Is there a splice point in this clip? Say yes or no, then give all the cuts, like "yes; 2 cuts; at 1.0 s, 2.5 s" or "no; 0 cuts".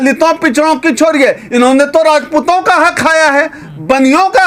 no; 0 cuts